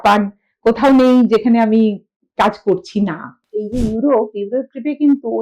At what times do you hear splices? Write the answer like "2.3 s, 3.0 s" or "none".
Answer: 3.3 s